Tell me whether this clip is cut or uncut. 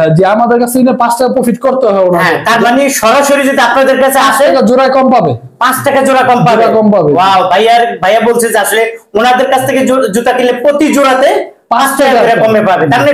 uncut